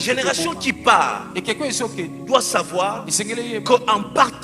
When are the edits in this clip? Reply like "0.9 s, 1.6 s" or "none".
none